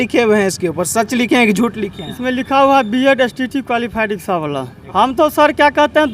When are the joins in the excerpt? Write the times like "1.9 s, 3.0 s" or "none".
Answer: 4.7 s